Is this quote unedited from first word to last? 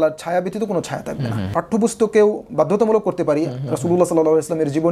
no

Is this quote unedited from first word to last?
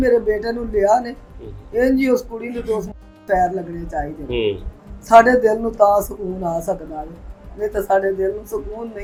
yes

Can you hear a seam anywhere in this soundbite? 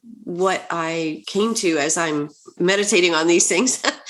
yes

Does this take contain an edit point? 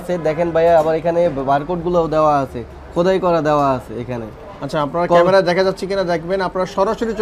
no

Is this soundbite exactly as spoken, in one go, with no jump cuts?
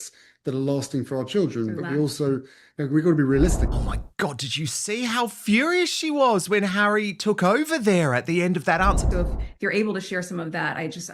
no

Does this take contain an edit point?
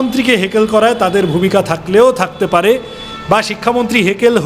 no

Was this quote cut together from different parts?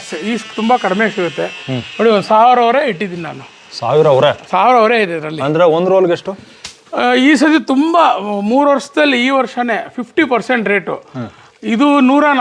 no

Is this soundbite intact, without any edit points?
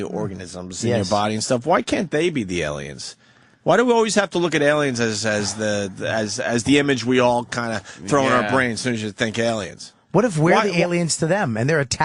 yes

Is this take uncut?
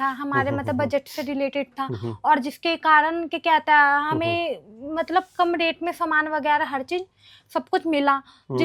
yes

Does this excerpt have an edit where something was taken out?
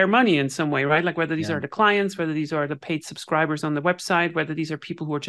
no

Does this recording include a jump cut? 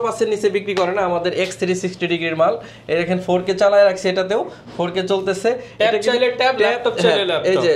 no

